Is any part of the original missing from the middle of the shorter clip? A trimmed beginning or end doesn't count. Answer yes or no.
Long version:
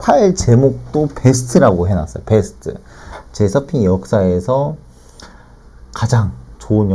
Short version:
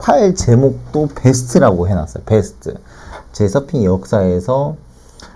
no